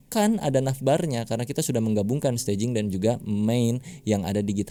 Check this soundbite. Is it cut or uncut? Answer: uncut